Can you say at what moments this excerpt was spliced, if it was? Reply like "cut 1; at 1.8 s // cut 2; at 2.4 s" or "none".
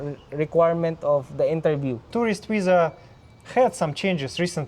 cut 1; at 2.1 s